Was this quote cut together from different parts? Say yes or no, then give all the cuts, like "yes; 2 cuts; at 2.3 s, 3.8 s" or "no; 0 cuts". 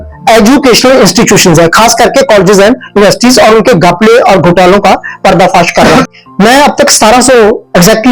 yes; 1 cut; at 6.1 s